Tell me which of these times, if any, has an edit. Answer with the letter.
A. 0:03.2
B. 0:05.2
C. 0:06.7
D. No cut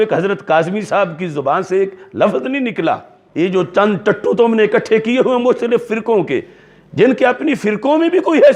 A